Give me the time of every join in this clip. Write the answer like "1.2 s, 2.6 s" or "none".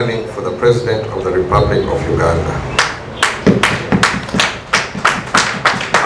none